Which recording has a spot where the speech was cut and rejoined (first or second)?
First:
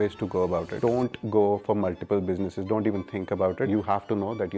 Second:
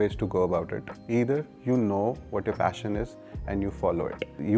first